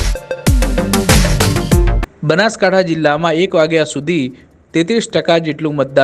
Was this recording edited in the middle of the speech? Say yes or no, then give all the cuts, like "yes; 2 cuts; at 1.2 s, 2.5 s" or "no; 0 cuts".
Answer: yes; 1 cut; at 2.0 s